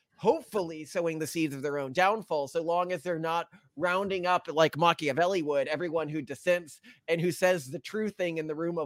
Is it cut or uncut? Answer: uncut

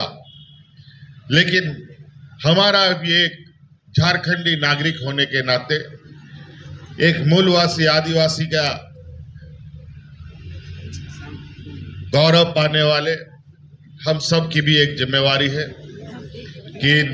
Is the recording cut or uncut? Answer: uncut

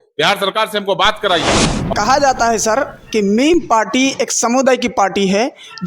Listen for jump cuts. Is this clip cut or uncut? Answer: cut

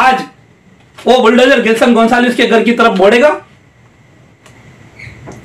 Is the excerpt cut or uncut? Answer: cut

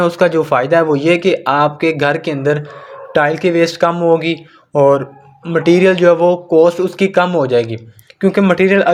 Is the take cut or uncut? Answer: uncut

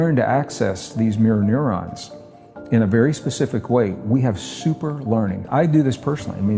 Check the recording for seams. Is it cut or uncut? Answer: cut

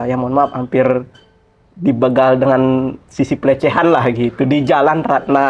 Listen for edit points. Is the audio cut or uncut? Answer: uncut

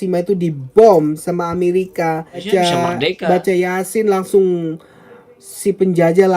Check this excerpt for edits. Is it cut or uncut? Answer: cut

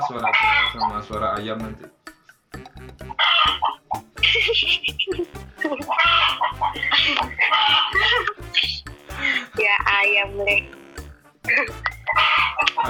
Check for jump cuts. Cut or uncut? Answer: uncut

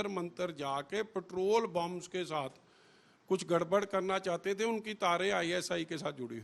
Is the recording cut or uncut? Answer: uncut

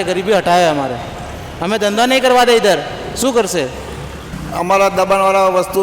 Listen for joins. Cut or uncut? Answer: cut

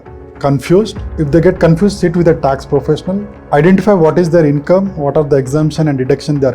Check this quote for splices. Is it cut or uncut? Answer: cut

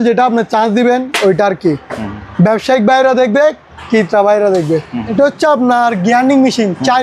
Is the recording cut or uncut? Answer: cut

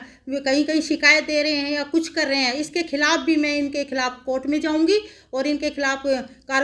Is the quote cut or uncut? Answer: uncut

